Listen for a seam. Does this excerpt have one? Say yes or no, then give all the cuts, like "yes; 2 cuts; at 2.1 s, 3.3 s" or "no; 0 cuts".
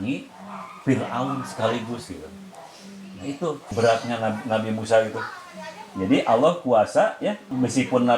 yes; 1 cut; at 3.7 s